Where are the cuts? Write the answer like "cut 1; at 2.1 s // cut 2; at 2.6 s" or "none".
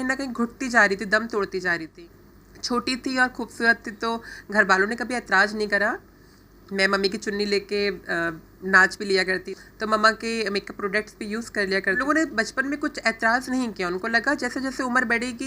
cut 1; at 1.9 s // cut 2; at 9.6 s // cut 3; at 12.0 s